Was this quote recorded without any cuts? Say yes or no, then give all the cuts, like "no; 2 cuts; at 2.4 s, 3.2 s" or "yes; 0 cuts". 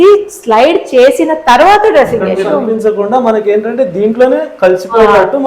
no; 1 cut; at 2.5 s